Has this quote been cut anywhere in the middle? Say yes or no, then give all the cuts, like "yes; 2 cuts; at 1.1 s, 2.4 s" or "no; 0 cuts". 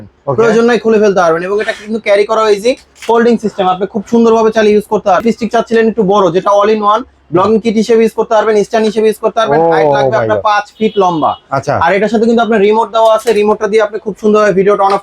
yes; 1 cut; at 5.2 s